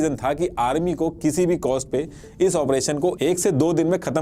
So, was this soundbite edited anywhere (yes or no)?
no